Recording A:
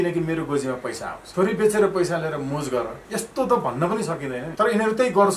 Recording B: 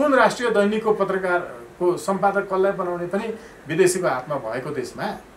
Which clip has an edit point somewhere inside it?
A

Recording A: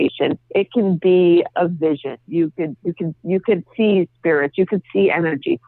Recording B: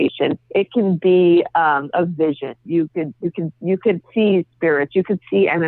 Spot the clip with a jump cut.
A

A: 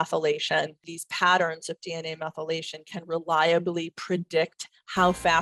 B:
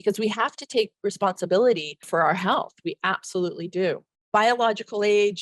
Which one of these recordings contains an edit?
B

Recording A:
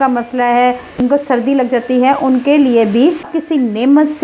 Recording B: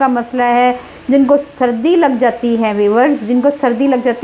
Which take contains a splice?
A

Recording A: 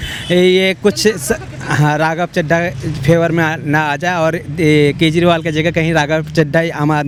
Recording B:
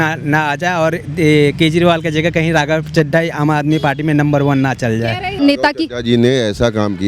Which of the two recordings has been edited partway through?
B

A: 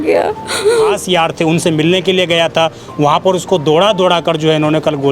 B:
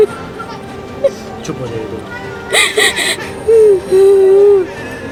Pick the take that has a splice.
A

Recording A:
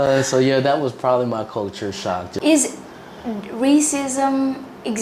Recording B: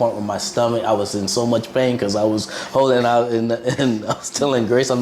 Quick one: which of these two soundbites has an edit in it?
A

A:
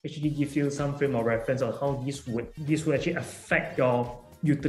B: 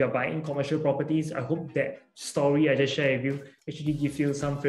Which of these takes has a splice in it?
A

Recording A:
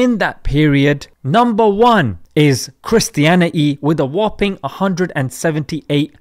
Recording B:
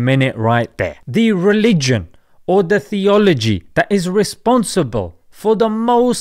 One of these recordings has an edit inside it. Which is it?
B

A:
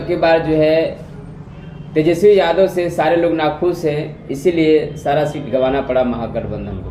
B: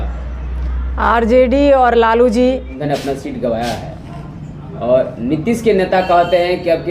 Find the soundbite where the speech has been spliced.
B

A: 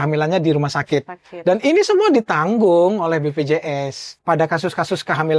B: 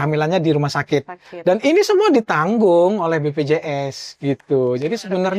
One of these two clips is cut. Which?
A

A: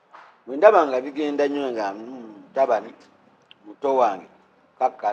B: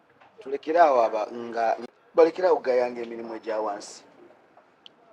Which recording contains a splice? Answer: B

